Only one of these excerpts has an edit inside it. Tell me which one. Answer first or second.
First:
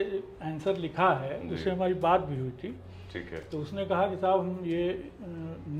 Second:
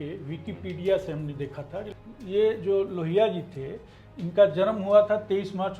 second